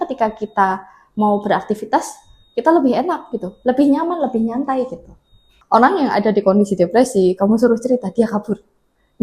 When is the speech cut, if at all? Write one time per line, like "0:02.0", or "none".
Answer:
0:05.5